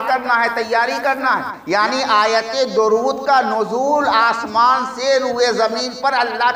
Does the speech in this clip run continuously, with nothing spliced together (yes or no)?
no